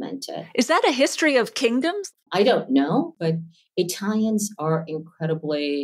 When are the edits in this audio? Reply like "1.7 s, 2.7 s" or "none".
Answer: 2.0 s, 3.1 s